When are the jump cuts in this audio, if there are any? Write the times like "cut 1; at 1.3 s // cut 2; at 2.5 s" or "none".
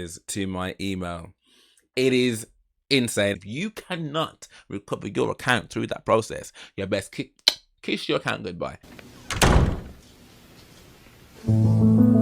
cut 1; at 3.4 s